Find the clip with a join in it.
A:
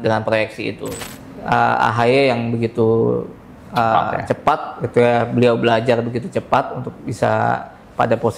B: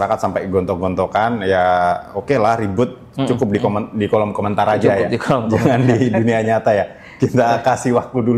A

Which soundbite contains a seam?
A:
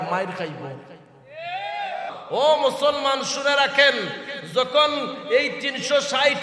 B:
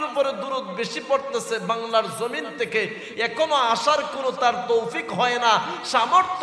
A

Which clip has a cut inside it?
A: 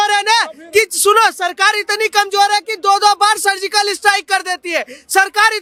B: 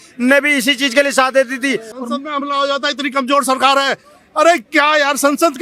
B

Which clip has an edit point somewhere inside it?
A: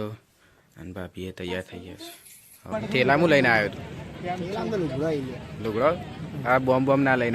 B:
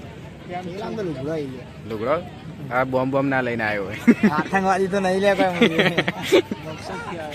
A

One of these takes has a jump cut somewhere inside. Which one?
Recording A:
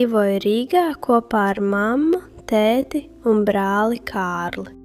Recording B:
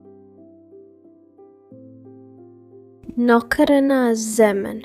B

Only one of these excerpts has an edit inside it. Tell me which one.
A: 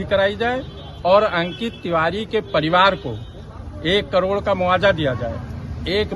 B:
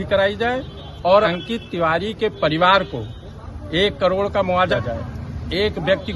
B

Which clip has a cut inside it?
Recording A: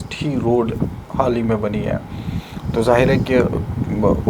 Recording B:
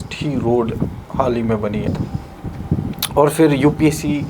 B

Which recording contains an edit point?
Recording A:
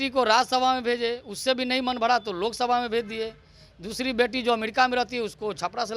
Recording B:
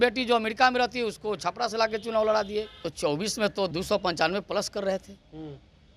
B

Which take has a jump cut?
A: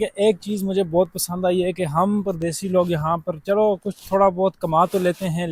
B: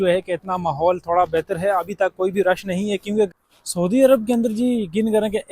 B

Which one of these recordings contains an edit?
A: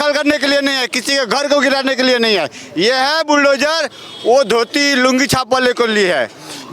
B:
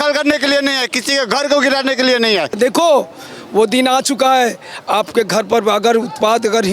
B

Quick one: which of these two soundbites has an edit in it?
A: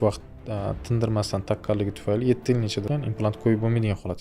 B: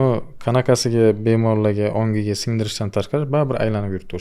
A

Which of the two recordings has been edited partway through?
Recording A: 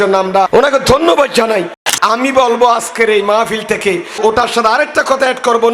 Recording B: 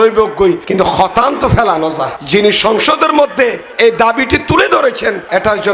A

